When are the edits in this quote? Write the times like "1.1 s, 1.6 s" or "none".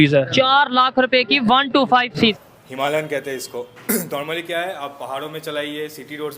2.3 s